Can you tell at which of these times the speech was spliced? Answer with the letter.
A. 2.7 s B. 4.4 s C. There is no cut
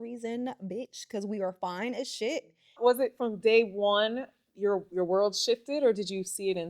A